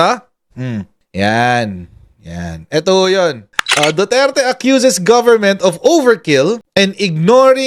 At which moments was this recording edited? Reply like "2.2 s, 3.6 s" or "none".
3.5 s, 6.6 s